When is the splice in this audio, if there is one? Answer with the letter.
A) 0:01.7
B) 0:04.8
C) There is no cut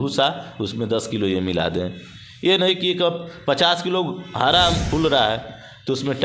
B